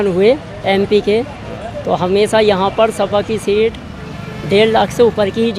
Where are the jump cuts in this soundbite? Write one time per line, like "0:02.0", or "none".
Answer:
none